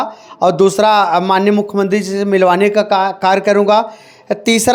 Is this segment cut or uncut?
uncut